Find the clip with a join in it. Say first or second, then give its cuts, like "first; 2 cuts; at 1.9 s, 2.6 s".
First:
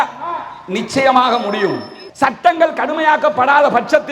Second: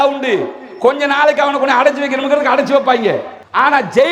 first; 1 cut; at 2.0 s